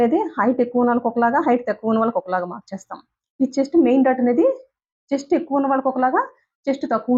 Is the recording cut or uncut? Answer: uncut